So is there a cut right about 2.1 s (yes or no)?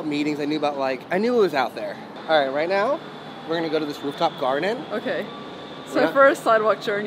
yes